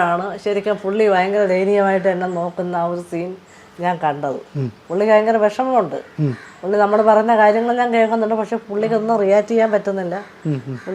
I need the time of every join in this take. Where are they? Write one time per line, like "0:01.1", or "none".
none